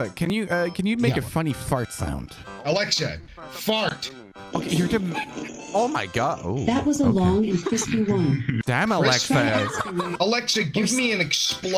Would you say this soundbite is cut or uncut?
cut